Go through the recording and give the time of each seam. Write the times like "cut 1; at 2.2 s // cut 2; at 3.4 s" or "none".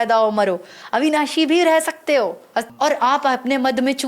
cut 1; at 2.7 s